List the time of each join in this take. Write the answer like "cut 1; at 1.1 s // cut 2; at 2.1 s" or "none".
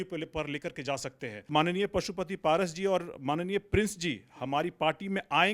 cut 1; at 1.4 s